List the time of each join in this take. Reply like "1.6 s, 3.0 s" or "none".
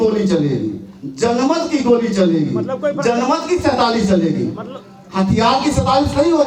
none